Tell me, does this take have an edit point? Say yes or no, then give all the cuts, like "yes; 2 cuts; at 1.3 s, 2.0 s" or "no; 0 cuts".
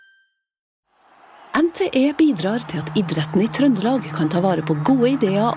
yes; 1 cut; at 1.2 s